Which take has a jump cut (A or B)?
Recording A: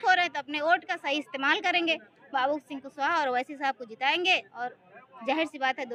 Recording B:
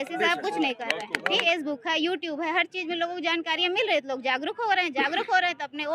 B